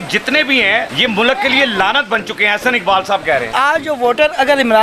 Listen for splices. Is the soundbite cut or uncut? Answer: cut